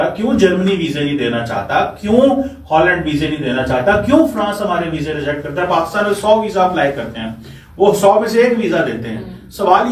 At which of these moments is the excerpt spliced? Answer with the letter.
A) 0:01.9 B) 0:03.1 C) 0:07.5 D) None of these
D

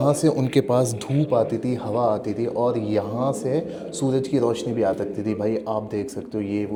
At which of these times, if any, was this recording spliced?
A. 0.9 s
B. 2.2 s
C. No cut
C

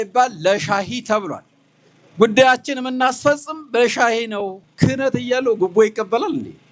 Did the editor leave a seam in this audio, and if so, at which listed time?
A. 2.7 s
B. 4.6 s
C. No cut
B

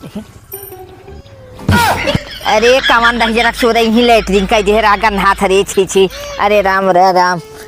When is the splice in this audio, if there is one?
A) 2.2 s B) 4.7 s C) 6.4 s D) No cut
D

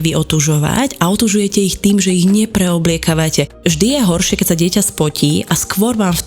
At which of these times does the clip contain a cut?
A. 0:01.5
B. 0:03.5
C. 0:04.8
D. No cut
B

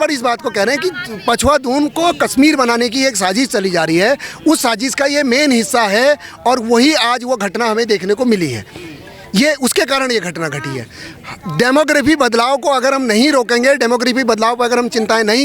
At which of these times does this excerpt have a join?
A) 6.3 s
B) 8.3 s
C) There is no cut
C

